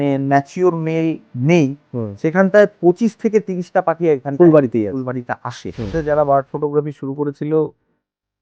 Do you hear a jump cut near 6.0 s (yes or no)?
yes